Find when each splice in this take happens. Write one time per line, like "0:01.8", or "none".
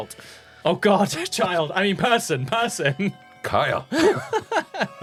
none